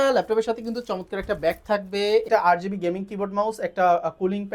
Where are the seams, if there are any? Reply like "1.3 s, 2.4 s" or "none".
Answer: 2.3 s